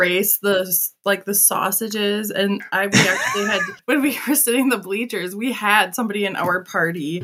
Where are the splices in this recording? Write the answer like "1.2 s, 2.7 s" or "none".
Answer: 3.7 s